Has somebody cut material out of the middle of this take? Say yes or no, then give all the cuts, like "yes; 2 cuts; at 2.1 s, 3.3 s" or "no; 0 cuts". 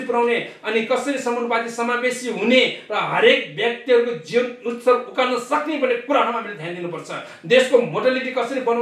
no; 0 cuts